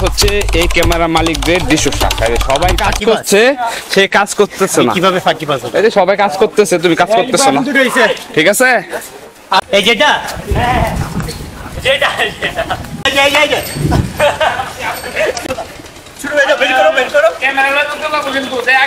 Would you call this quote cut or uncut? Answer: cut